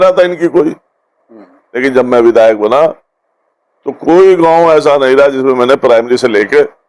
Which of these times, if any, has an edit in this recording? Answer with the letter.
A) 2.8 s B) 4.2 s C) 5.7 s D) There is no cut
D